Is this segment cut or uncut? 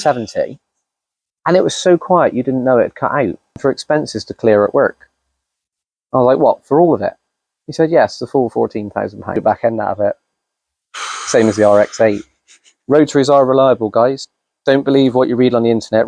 cut